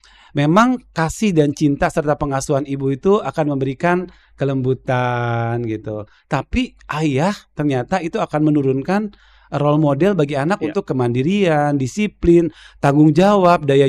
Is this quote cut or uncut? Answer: uncut